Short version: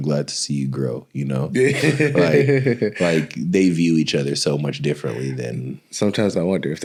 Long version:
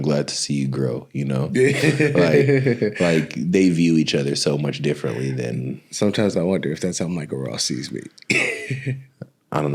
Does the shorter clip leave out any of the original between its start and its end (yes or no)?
no